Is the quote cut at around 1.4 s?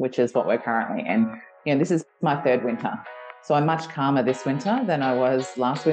no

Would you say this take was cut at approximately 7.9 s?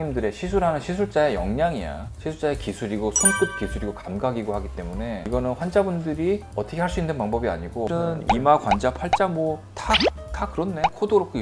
yes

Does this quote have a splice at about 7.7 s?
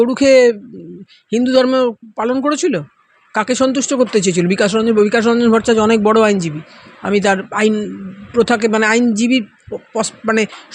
no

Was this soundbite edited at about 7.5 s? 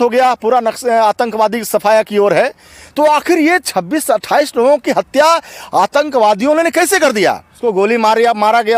yes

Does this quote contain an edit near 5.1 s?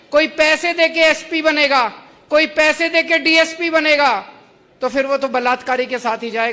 no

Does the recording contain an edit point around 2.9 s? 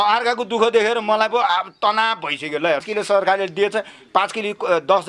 yes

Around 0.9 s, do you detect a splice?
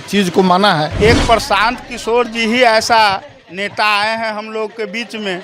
yes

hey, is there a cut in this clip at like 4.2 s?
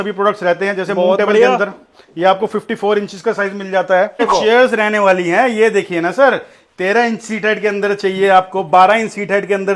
yes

